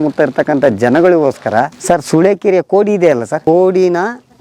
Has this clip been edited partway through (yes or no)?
yes